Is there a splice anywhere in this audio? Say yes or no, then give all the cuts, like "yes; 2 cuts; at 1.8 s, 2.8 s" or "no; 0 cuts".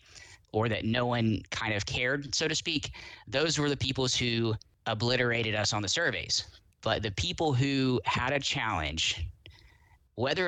yes; 1 cut; at 4.7 s